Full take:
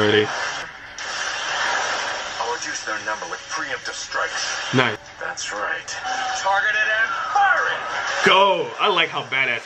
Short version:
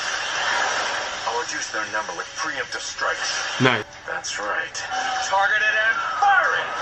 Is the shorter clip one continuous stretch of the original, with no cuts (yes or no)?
yes